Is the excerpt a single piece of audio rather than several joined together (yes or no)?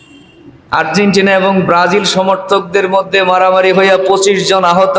yes